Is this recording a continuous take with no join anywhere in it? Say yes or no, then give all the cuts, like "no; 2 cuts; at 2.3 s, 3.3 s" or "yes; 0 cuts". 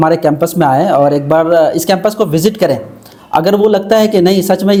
yes; 0 cuts